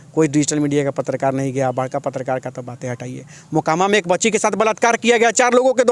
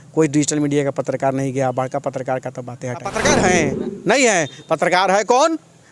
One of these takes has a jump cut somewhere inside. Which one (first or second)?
second